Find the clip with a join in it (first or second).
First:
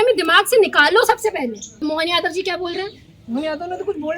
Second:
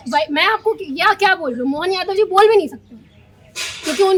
first